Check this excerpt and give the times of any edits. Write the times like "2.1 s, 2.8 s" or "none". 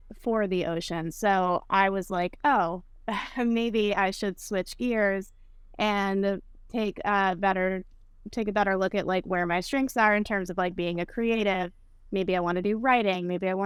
none